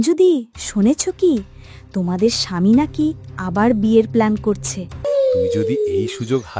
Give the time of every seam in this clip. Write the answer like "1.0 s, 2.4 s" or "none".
5.1 s